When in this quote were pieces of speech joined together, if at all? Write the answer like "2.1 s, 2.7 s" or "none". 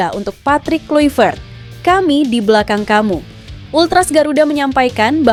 none